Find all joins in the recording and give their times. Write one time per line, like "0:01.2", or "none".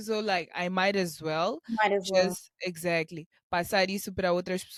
none